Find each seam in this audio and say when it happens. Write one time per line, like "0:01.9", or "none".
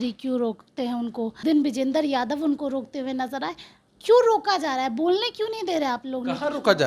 0:01.4